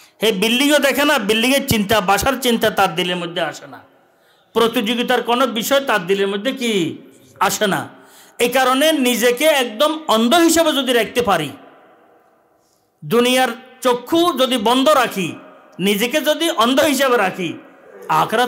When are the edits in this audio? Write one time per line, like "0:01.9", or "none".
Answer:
none